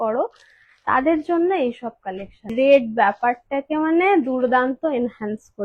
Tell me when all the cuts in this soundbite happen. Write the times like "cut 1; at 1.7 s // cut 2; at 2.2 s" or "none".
cut 1; at 2.5 s